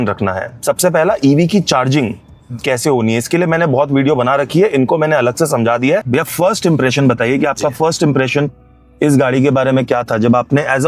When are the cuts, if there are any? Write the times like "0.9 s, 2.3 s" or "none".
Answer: none